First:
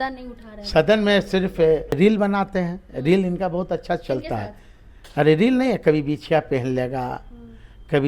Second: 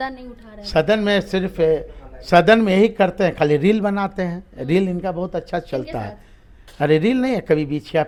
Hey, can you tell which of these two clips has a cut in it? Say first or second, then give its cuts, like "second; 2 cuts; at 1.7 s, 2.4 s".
first; 1 cut; at 2.0 s